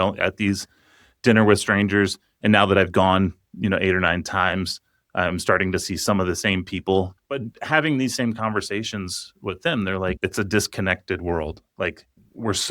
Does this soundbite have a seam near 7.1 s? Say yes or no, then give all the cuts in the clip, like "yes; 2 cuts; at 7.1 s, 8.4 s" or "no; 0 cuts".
yes; 2 cuts; at 7.1 s, 10.2 s